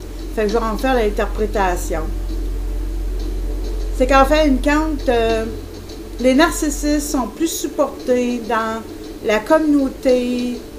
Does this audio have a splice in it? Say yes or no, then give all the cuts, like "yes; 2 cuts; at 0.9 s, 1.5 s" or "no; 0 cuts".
no; 0 cuts